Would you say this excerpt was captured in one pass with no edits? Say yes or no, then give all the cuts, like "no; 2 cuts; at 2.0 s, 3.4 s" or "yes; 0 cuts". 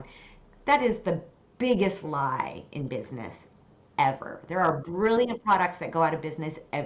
yes; 0 cuts